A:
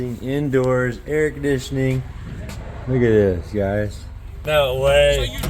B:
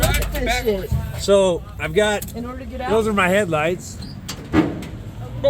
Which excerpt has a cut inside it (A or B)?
A